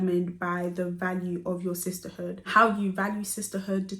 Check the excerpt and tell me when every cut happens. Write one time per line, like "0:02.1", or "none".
0:02.4

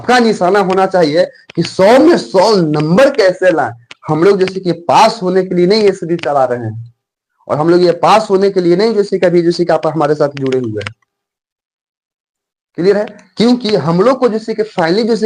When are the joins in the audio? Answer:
none

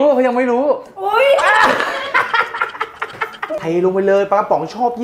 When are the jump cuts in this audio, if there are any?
0:03.5

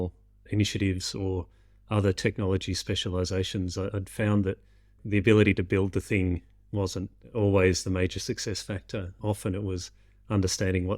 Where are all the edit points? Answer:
0:07.2

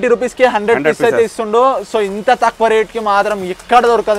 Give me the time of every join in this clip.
none

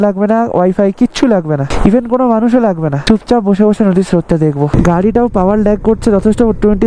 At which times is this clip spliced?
0:01.6
0:02.9
0:04.7

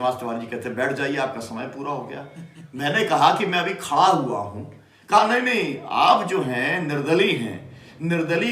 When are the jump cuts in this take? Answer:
none

